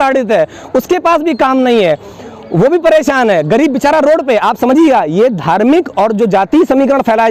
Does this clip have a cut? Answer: no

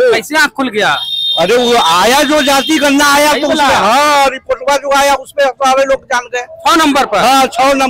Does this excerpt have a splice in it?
no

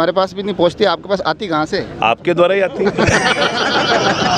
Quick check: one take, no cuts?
yes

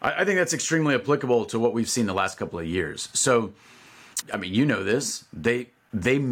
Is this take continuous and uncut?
yes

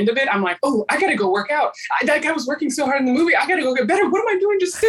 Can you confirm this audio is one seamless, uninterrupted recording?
yes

